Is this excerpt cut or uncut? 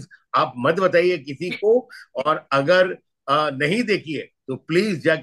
uncut